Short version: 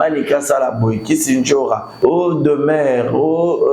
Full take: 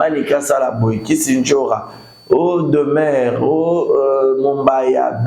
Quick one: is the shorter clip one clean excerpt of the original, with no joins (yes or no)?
no